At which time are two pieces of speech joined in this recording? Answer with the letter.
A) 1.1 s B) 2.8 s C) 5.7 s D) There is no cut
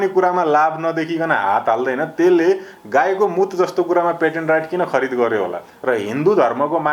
C